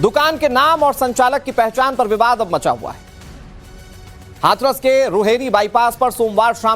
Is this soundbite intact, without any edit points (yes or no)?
no